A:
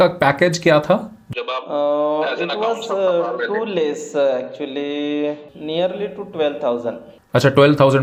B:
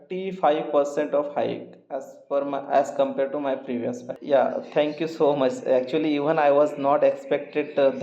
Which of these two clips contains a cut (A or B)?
B